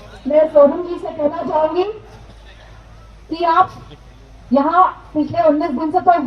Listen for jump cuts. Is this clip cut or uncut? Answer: uncut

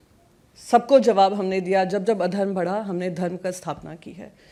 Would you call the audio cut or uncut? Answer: uncut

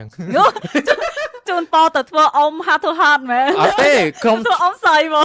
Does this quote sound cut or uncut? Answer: uncut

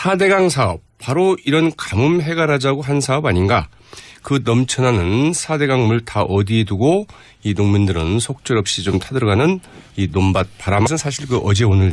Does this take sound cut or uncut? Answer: uncut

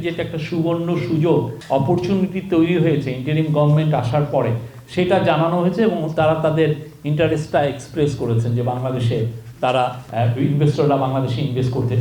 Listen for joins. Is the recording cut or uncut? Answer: cut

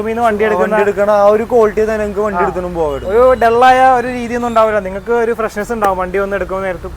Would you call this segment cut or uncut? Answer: uncut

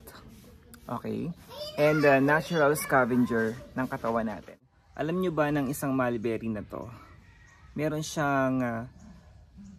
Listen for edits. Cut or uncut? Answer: cut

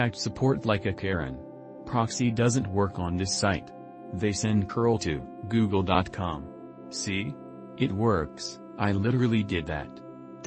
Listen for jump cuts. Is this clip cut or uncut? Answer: cut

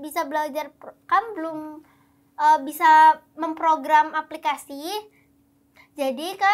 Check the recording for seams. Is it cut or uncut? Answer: uncut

